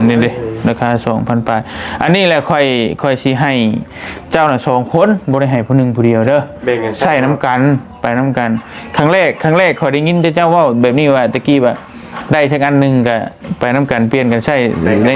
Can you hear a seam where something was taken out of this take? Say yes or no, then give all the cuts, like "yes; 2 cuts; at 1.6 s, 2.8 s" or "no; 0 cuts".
no; 0 cuts